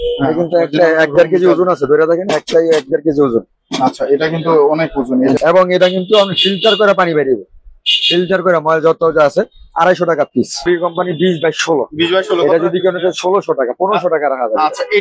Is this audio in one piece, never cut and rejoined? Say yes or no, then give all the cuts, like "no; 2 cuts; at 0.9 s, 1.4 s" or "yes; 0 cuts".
no; 2 cuts; at 5.4 s, 10.7 s